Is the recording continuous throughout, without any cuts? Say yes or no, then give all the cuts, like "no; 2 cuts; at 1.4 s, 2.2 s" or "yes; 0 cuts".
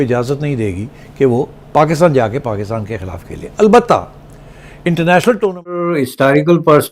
no; 1 cut; at 6.0 s